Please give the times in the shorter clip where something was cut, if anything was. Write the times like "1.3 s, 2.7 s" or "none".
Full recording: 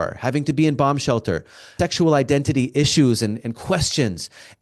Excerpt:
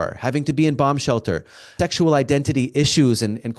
none